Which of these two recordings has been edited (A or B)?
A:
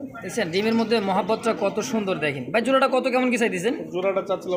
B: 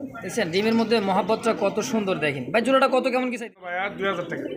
B